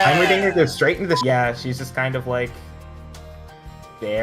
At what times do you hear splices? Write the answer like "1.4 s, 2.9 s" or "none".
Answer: 1.2 s